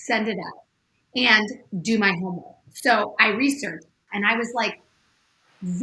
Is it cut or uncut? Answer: cut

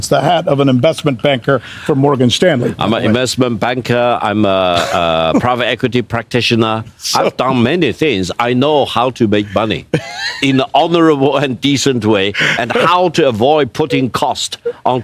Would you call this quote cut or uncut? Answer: uncut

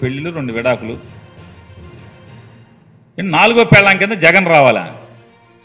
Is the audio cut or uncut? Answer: cut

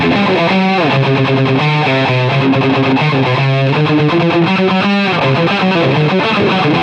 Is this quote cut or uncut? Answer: uncut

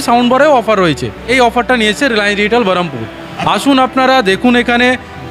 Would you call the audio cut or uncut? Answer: uncut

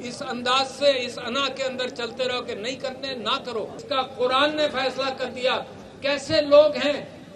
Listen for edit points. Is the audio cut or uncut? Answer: cut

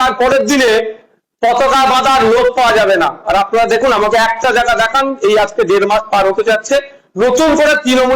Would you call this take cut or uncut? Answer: uncut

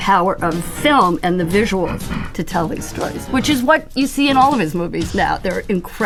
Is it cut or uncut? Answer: uncut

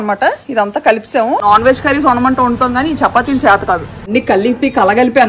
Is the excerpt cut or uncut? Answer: cut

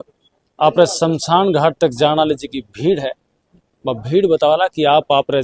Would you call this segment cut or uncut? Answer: uncut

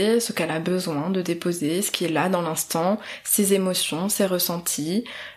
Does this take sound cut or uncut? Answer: uncut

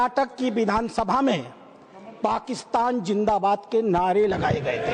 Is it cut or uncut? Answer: uncut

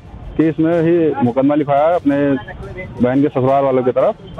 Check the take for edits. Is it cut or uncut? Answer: uncut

